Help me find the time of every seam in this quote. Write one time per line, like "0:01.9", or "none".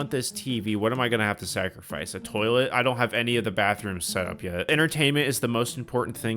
0:04.7